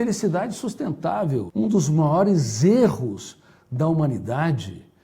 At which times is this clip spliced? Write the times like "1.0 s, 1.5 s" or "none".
1.5 s